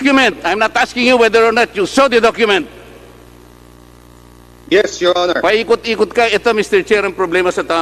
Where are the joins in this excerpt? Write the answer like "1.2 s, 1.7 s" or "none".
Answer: none